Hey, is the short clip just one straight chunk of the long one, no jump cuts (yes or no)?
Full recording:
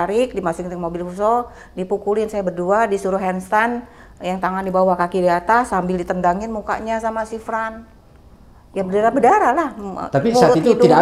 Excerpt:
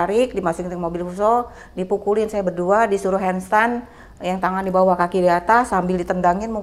yes